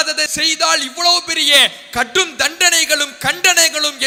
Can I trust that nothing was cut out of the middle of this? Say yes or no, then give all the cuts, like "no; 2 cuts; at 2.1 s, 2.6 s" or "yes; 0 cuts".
yes; 0 cuts